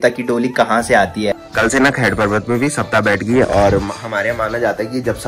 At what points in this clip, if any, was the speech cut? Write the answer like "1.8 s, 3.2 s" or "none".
1.4 s